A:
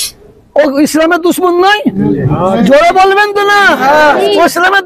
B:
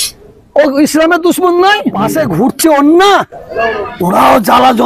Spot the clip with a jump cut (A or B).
B